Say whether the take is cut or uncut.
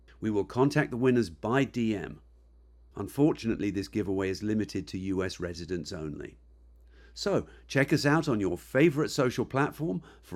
uncut